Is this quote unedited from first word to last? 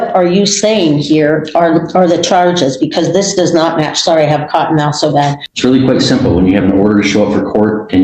no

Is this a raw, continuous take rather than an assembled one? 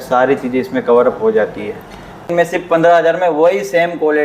no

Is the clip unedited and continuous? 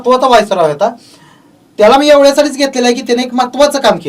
yes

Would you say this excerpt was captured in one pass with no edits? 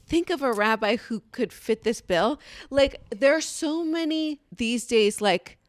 no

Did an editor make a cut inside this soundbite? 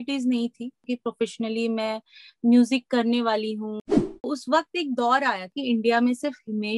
yes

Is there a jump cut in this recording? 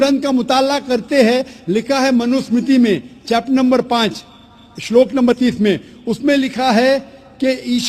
yes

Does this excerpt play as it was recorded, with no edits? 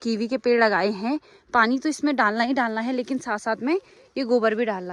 yes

